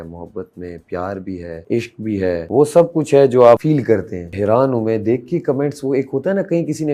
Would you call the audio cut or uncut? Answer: cut